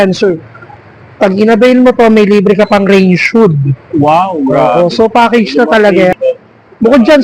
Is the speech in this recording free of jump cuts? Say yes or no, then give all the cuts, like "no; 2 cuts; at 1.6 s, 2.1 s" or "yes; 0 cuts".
no; 1 cut; at 6.1 s